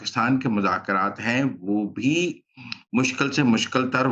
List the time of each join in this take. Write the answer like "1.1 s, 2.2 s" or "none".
none

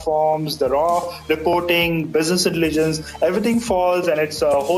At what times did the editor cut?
none

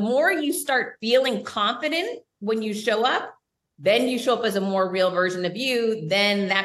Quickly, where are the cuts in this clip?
0.9 s

